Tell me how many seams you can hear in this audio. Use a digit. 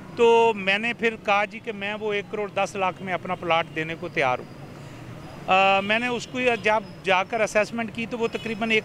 0